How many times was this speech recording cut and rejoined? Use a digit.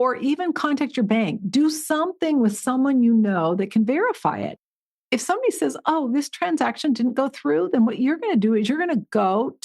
0